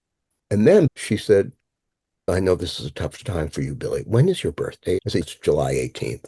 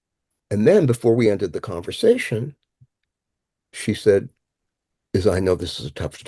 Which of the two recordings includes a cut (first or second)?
first